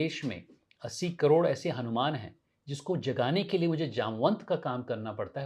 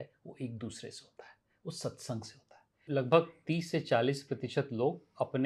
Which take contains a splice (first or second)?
second